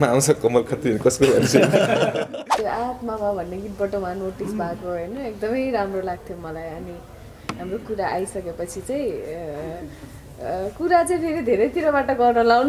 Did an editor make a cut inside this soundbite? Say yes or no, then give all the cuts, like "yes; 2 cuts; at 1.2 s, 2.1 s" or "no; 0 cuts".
yes; 1 cut; at 2.4 s